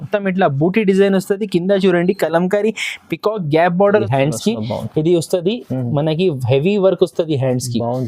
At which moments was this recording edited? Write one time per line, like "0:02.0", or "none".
0:04.0